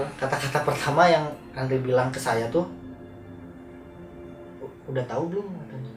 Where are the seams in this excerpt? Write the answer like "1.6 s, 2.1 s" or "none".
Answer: none